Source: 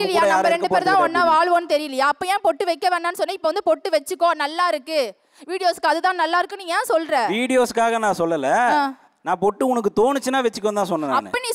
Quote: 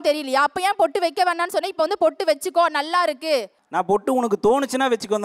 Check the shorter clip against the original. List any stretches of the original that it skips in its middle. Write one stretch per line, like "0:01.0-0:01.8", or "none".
0:05.2-0:09.1